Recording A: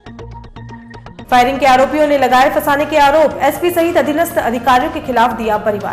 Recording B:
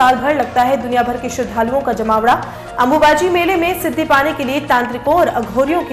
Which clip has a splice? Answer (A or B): A